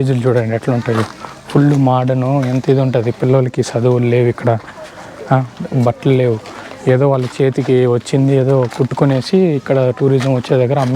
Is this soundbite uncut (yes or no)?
yes